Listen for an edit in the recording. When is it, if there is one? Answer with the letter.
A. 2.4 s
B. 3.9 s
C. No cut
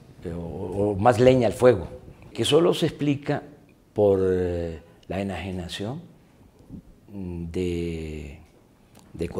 A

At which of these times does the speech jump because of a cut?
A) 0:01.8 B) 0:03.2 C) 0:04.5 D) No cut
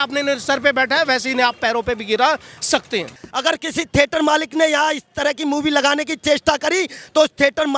B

